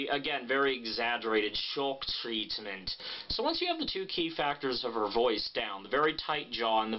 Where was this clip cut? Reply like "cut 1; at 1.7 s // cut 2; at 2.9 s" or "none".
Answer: cut 1; at 2.7 s